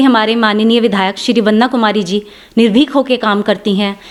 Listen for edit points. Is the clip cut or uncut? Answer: uncut